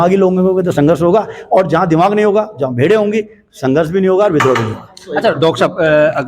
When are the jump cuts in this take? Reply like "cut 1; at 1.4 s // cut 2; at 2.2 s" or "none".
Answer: none